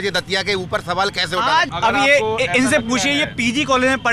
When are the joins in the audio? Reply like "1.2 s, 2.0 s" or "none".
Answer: 1.7 s